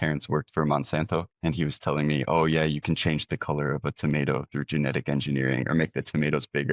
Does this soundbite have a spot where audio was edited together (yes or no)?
no